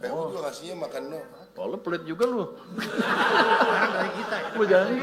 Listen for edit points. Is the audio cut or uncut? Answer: uncut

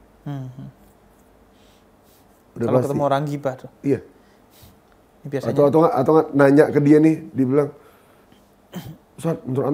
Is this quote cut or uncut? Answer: uncut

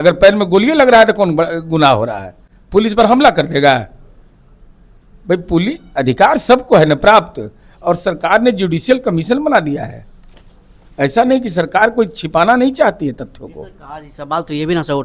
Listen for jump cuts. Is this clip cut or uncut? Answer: uncut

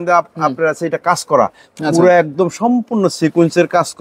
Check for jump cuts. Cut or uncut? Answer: uncut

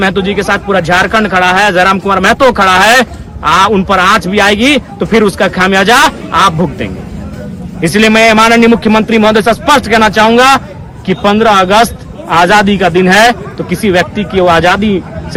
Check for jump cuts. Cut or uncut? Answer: uncut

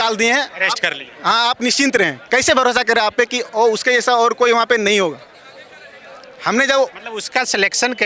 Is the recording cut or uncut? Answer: uncut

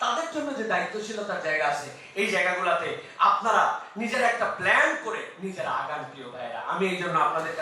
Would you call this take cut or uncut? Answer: uncut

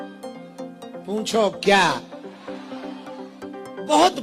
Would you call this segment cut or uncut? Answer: uncut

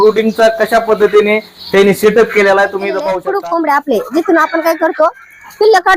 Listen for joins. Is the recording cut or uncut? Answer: cut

